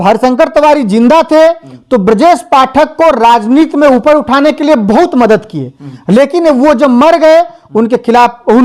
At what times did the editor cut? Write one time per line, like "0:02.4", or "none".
none